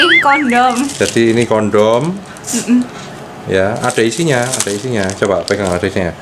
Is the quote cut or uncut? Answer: uncut